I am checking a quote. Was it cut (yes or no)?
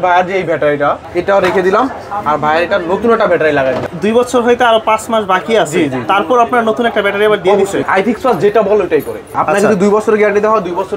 yes